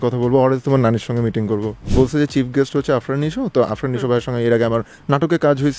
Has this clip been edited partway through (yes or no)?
yes